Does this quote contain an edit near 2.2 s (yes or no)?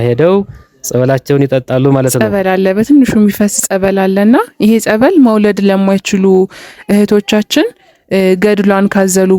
yes